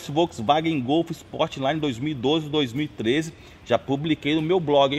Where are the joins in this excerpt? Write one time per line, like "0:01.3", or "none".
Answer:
none